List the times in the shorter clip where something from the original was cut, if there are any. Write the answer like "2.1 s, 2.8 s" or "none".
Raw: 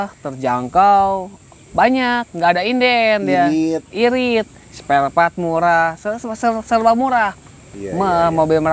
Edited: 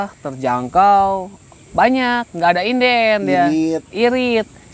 none